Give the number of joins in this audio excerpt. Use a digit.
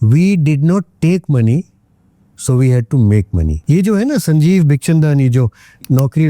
1